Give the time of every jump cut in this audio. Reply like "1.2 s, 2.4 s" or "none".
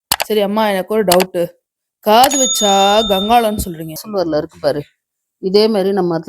4.0 s